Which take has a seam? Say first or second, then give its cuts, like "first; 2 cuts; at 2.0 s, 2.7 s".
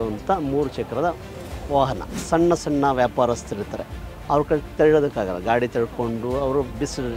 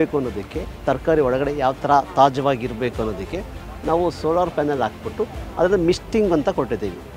first; 1 cut; at 2.2 s